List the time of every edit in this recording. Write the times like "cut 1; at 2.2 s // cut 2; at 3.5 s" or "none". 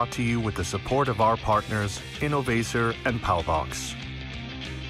cut 1; at 3.7 s